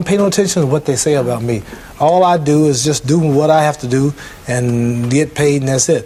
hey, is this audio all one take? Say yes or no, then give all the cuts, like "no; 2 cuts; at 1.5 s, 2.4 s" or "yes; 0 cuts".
yes; 0 cuts